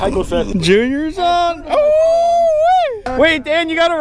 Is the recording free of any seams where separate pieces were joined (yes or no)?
no